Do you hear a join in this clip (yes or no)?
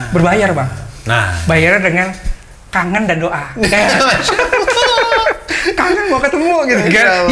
no